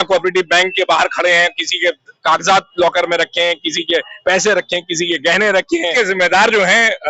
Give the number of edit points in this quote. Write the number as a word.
one